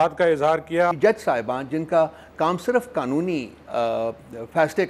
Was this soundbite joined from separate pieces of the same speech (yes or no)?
yes